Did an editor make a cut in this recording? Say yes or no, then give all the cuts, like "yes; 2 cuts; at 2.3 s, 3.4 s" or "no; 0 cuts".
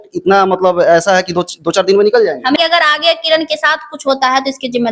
yes; 1 cut; at 2.6 s